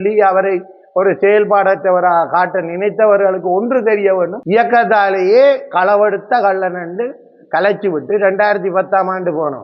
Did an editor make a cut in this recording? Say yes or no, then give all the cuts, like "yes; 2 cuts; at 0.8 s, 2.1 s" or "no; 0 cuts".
yes; 1 cut; at 4.4 s